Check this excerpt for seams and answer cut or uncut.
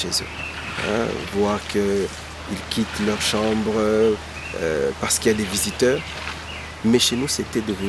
uncut